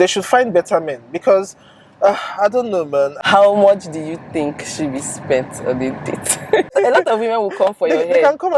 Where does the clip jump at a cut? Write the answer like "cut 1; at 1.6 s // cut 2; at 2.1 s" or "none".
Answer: cut 1; at 3.2 s // cut 2; at 6.7 s